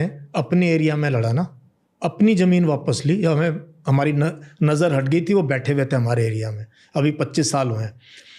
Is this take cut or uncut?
uncut